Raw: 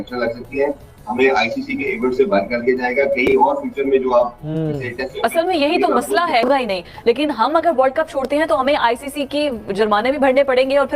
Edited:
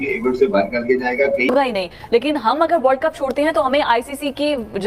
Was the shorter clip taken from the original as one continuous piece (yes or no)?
no